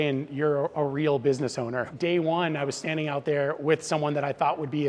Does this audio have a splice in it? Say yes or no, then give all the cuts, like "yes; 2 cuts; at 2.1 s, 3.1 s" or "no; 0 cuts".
yes; 1 cut; at 1.9 s